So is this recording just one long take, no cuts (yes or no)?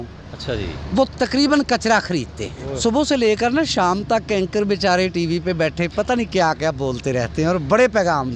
no